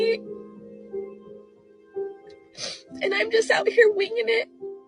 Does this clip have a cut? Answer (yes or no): no